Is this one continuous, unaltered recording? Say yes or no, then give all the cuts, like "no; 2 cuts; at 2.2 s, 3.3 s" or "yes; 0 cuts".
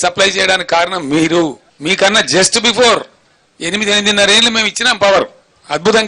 no; 1 cut; at 1.7 s